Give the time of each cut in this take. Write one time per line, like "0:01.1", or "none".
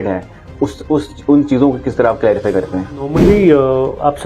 0:03.1